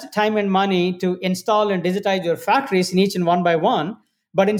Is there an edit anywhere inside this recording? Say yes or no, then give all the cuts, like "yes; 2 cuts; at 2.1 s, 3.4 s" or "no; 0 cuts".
no; 0 cuts